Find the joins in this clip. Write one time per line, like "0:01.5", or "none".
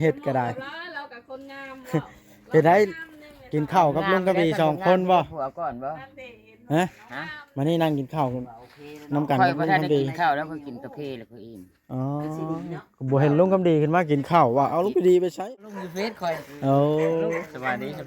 0:15.4